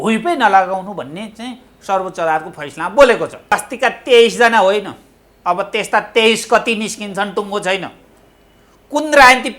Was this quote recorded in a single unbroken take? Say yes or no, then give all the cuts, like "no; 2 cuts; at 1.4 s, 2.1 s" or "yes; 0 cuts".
no; 1 cut; at 3.6 s